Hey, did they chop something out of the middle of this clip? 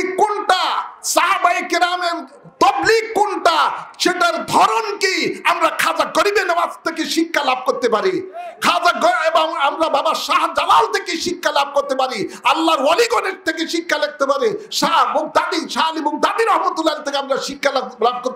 no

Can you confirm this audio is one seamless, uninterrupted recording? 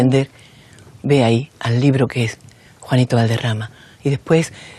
yes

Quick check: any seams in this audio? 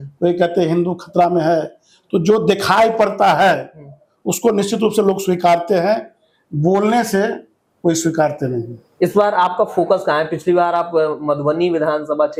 no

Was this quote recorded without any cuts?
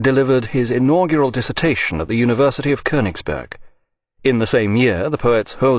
no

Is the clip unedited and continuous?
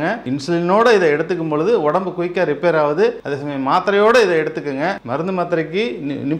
yes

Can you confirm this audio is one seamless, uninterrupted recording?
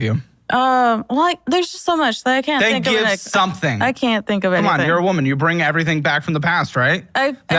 no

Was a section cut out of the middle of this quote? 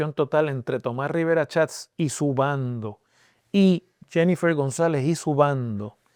no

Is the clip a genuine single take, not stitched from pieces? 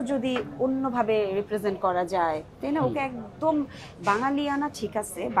yes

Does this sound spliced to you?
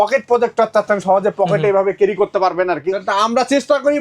yes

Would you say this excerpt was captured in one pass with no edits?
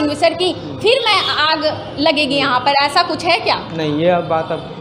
yes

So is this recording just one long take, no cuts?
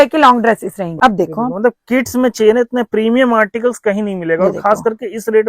no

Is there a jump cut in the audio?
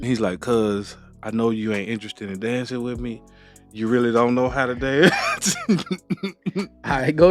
no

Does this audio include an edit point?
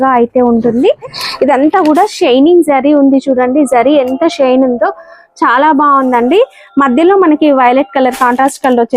yes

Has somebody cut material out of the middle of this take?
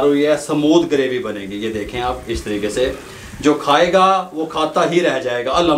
no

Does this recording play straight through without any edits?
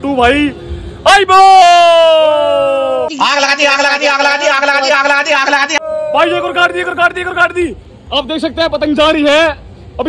yes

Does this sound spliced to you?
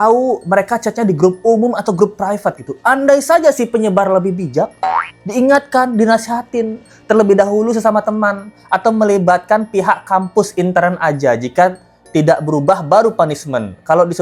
no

